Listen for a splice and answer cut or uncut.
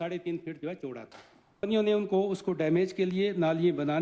cut